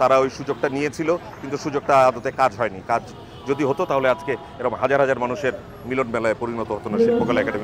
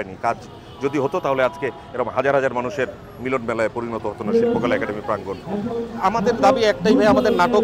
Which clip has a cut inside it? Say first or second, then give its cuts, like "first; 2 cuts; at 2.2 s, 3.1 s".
second; 1 cut; at 6.0 s